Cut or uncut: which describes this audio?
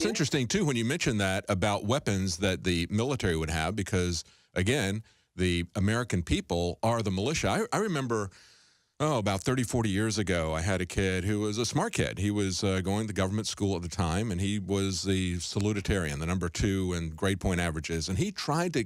cut